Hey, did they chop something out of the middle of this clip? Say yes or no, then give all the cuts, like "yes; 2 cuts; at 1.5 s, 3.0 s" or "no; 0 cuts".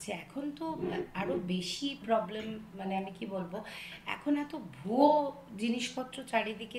no; 0 cuts